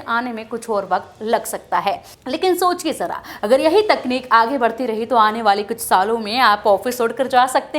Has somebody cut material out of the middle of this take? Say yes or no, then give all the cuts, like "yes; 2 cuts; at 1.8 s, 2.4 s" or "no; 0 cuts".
yes; 1 cut; at 2.1 s